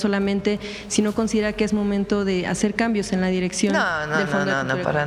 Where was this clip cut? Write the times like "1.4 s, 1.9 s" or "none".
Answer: none